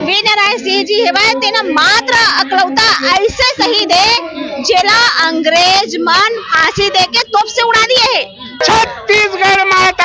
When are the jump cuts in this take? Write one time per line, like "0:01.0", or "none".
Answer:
0:08.6